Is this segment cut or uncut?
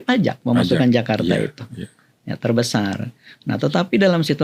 uncut